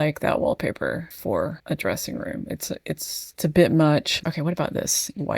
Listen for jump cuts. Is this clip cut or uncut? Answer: cut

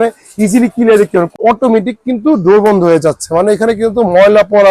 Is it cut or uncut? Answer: cut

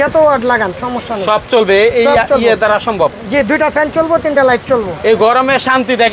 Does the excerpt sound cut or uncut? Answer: uncut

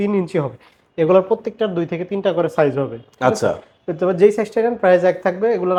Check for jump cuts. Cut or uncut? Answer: uncut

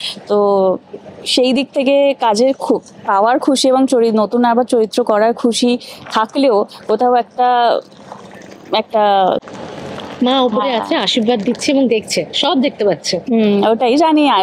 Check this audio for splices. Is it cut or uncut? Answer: uncut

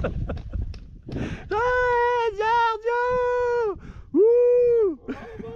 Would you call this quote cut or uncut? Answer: uncut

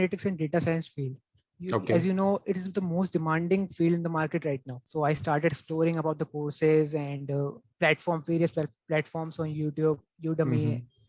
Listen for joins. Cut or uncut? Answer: cut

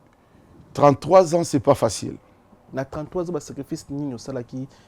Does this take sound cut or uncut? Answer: cut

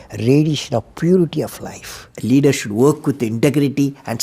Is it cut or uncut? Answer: cut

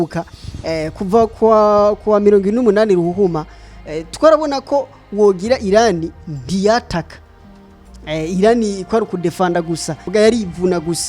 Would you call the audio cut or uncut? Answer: cut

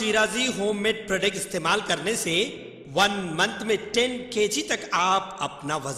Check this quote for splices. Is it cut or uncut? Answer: uncut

